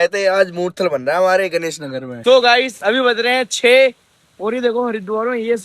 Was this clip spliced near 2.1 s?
yes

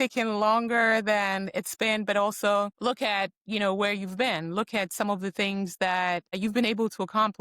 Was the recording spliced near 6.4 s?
yes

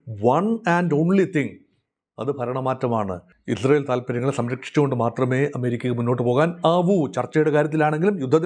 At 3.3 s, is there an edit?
yes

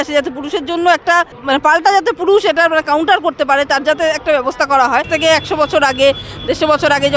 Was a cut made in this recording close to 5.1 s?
yes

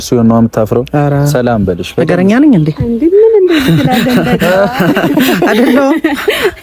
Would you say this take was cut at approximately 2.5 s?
no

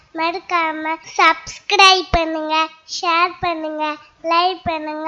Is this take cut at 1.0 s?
yes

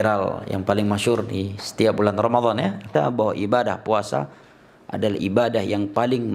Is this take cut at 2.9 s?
yes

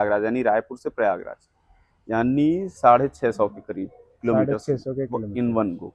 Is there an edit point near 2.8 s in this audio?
no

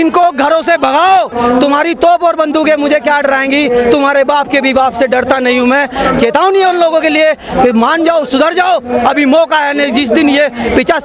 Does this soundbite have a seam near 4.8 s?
no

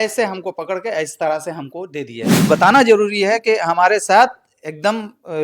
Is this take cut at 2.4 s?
yes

